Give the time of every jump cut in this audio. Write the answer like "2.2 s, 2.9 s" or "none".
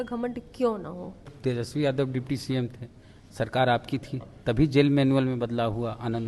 1.3 s